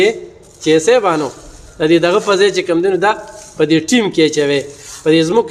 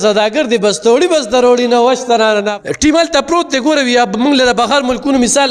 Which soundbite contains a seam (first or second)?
second